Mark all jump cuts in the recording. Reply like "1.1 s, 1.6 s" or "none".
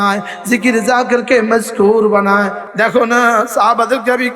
2.6 s